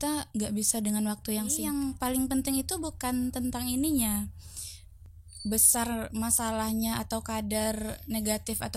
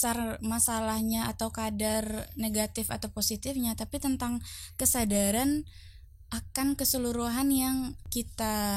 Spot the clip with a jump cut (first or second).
first